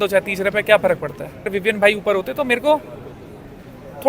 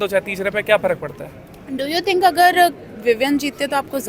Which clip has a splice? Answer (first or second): first